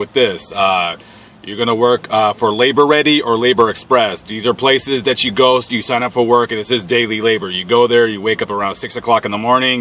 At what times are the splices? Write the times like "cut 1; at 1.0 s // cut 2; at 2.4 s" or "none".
none